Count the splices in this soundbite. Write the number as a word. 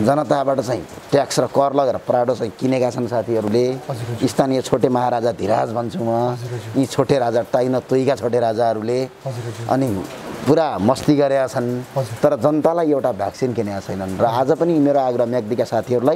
zero